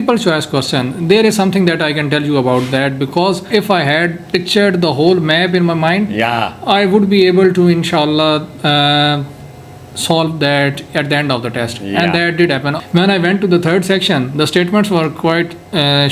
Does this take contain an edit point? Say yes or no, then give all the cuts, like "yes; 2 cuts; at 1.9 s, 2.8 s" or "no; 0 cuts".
yes; 2 cuts; at 3.4 s, 12.8 s